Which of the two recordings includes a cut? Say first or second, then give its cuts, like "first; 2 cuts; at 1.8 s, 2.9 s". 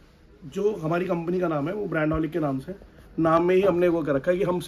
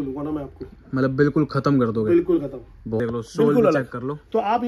second; 1 cut; at 3.0 s